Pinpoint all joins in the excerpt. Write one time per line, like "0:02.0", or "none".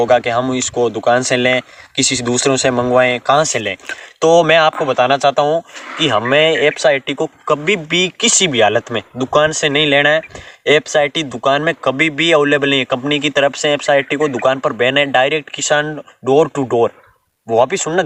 none